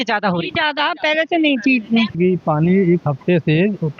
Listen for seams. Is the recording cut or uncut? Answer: cut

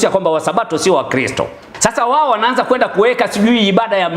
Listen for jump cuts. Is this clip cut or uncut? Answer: cut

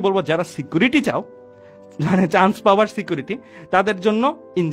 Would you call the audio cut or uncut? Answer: uncut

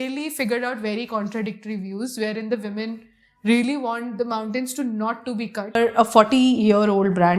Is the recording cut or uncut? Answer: cut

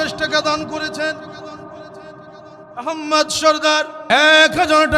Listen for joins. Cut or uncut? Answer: cut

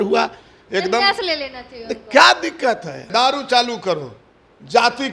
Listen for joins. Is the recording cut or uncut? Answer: cut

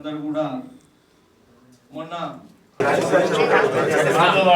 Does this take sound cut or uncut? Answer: cut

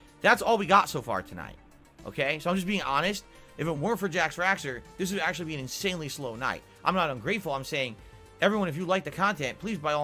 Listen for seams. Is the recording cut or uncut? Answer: cut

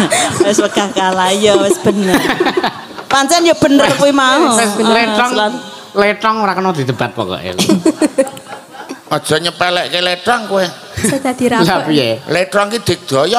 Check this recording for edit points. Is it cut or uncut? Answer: uncut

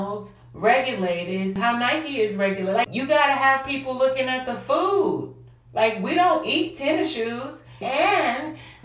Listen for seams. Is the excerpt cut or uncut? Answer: cut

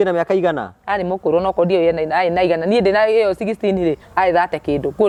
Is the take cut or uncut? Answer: uncut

